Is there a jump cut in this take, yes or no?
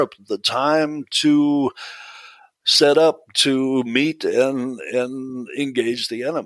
no